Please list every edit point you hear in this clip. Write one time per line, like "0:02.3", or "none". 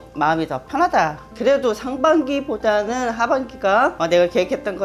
0:01.2
0:04.0